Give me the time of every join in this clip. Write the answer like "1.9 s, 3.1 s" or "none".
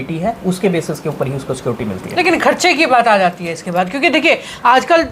none